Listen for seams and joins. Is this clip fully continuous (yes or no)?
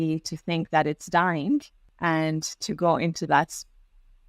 no